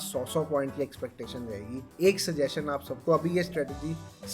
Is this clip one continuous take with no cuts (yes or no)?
yes